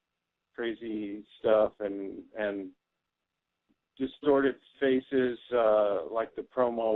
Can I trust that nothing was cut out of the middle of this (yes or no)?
yes